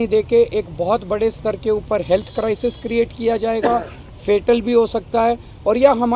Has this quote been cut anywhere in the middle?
no; 0 cuts

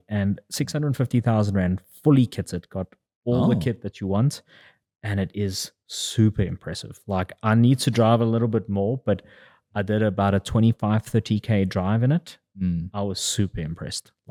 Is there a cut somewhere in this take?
no; 0 cuts

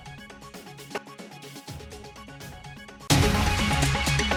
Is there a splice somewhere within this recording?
no; 0 cuts

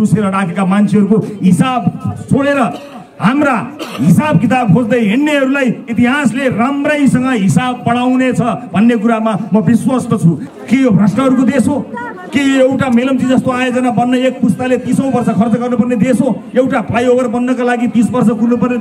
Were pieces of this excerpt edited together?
yes; 1 cut; at 10.5 s

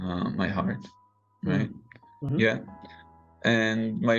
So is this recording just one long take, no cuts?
no; 1 cut; at 2.3 s

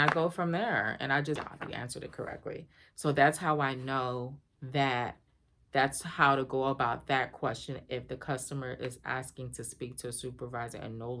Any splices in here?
yes; 1 cut; at 1.4 s

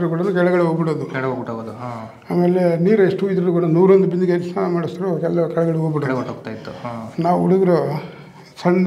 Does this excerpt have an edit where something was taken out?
no; 0 cuts

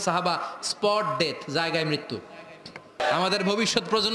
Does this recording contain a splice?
yes; 1 cut; at 3.0 s

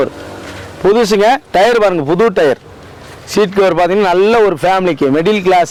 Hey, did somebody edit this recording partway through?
no; 0 cuts

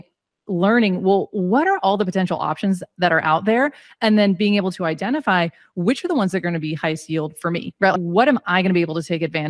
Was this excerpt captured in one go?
yes; 0 cuts

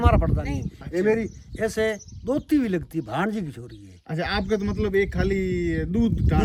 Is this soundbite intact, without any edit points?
yes; 0 cuts

